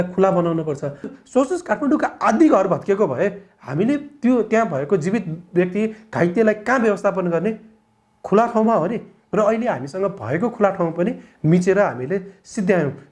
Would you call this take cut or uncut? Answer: cut